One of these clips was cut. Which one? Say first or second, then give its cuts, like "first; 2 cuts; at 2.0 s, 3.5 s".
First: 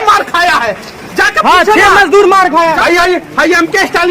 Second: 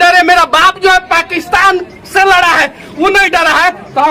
first; 1 cut; at 2.8 s